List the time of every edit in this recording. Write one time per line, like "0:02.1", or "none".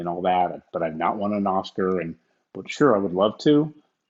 none